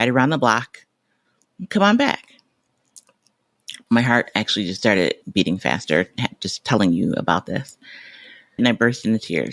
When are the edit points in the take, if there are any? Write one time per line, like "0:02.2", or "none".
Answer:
0:05.2
0:08.6